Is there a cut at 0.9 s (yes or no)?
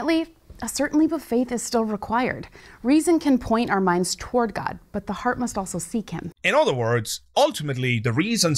no